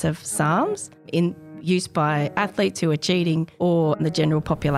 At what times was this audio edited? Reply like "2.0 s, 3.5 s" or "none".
1.1 s, 4.0 s